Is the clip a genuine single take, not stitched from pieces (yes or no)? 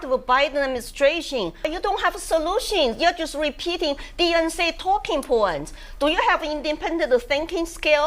no